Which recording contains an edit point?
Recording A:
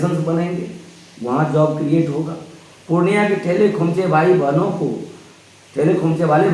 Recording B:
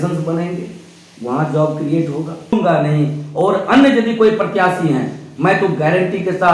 B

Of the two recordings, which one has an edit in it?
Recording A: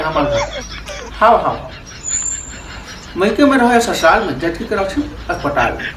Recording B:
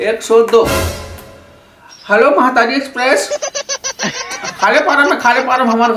B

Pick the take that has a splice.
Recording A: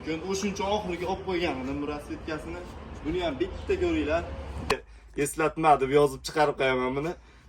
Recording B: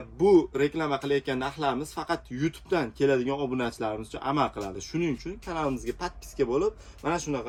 A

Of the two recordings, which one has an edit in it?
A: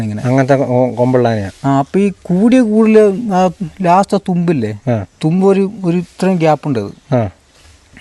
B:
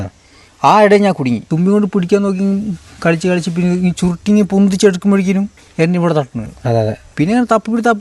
B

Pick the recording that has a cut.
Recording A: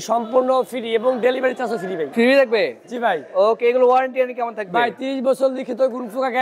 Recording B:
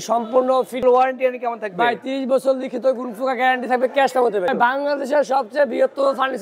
B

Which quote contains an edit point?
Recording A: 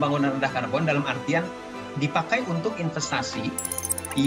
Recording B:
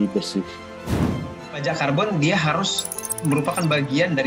B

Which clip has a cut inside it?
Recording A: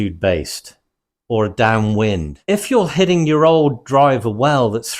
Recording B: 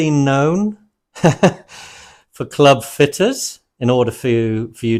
A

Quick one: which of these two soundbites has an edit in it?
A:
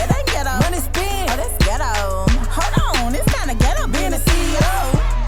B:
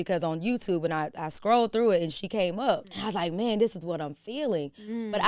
B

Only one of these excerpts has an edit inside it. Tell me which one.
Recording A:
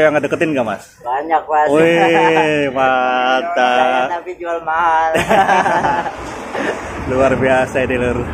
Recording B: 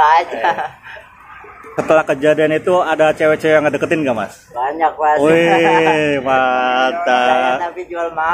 B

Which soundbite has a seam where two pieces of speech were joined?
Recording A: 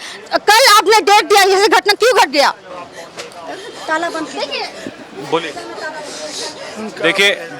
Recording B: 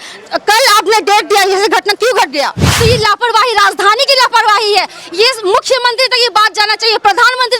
B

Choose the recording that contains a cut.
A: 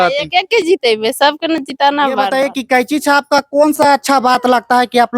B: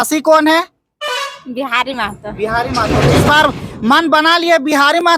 A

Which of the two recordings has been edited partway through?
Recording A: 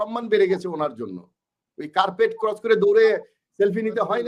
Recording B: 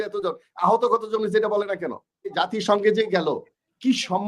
B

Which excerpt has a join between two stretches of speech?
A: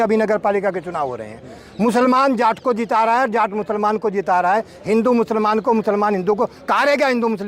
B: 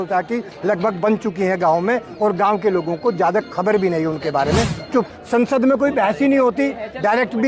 B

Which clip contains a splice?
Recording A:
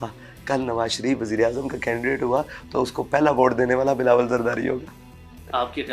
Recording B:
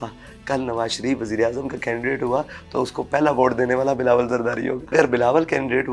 B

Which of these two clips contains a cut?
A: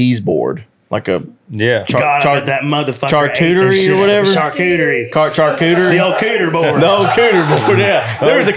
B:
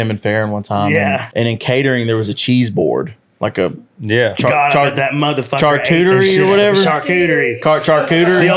B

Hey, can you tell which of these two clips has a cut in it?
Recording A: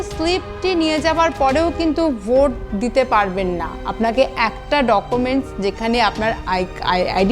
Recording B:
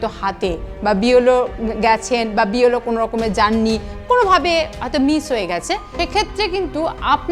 B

